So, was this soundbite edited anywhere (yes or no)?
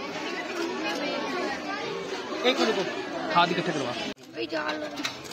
yes